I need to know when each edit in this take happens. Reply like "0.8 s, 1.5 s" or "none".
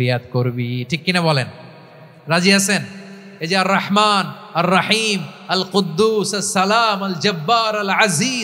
none